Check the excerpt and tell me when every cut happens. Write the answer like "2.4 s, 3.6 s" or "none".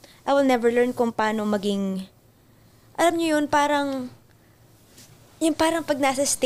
none